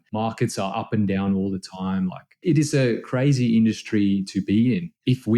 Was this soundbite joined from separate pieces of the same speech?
yes; 1 cut; at 2.4 s

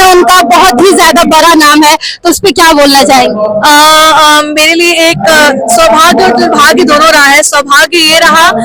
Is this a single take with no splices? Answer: yes; 0 cuts

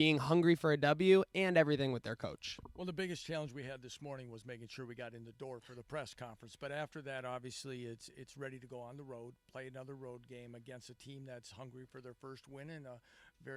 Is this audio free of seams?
yes; 0 cuts

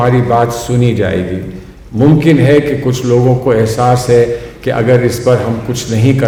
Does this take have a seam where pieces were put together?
no; 0 cuts

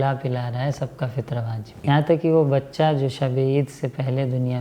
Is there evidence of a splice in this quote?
yes; 1 cut; at 1.8 s

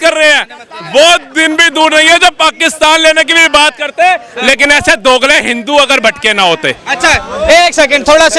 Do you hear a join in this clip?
no; 0 cuts

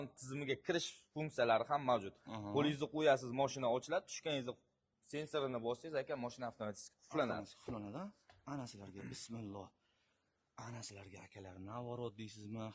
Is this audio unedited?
yes; 0 cuts

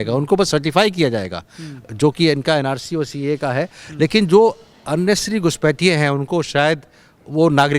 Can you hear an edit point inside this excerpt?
no; 0 cuts

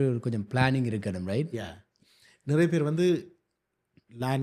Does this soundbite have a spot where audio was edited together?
no; 0 cuts

